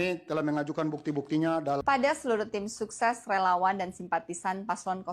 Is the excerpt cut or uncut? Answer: cut